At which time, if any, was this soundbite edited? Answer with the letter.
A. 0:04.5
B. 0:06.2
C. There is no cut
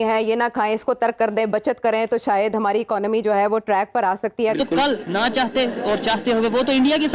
A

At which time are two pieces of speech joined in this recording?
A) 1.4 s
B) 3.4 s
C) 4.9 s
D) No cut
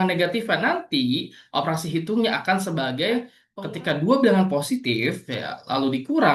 B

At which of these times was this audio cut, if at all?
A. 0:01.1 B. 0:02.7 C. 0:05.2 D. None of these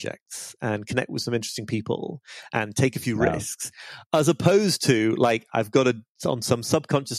D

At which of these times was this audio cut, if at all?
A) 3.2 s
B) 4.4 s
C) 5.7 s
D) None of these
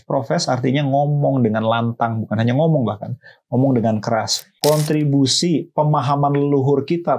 B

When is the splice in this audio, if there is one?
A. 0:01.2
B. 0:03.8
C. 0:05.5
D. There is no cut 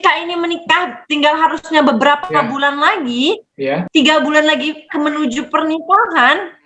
B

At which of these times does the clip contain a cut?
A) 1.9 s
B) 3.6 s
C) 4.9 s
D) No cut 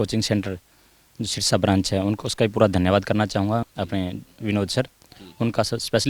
B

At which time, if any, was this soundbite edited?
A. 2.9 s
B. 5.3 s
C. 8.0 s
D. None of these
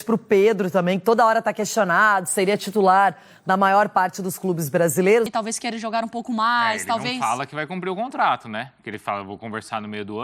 B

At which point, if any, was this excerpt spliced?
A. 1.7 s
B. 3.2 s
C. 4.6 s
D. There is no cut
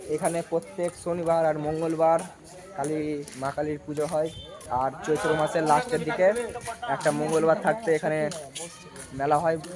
C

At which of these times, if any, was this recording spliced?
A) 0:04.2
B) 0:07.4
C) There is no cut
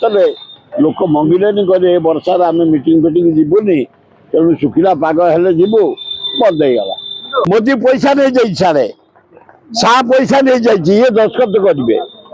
B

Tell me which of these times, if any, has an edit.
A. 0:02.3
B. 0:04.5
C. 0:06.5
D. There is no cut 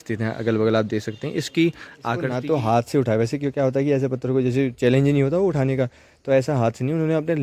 A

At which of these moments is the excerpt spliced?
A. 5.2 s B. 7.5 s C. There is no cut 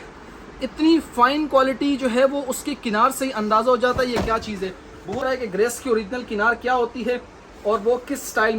A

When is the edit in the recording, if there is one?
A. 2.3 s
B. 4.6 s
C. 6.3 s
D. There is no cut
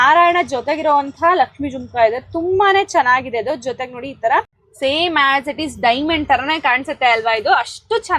B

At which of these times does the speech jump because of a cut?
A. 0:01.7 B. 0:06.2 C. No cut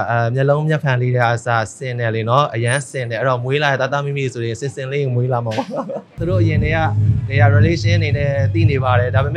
B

